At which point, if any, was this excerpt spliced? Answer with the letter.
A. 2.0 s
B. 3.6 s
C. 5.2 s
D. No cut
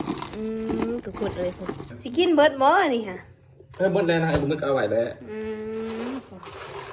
A